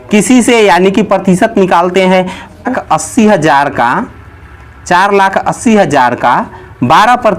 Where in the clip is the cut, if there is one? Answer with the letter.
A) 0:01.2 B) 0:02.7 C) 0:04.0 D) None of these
B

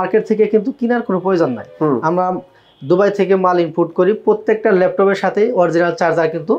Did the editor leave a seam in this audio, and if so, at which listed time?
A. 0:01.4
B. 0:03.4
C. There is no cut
C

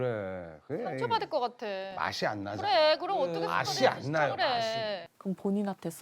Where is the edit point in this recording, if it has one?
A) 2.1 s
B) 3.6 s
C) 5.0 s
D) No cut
C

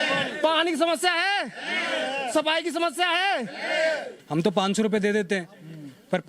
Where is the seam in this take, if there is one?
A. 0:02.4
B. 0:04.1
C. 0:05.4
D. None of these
B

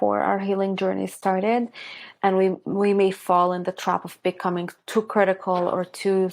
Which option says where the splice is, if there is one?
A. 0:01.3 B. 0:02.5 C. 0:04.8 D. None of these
C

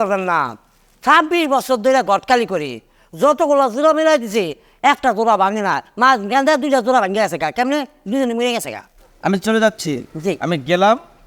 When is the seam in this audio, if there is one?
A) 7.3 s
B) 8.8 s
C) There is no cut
C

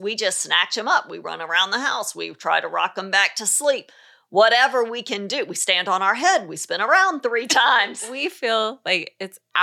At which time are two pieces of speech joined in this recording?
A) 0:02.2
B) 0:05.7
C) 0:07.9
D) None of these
C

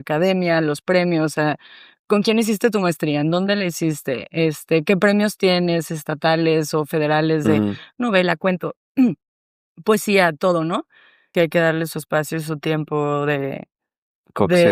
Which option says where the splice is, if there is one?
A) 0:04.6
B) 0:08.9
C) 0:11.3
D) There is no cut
C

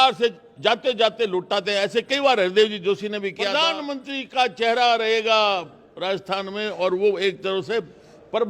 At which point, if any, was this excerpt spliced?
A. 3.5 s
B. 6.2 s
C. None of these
A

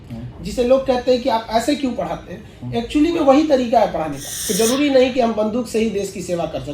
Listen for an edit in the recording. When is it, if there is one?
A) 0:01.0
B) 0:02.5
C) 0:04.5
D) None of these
C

